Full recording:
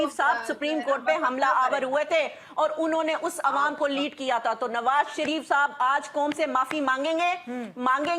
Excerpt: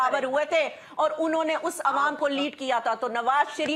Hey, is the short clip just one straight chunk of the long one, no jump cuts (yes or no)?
yes